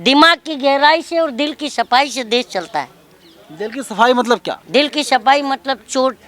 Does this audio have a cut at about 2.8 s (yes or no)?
no